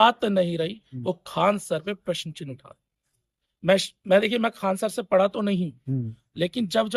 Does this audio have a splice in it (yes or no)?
no